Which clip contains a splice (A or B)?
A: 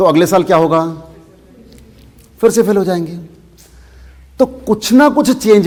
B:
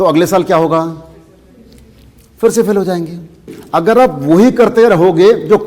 B